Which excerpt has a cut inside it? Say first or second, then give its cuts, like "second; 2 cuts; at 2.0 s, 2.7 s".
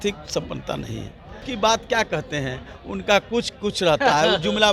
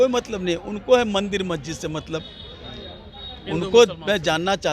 first; 1 cut; at 1.4 s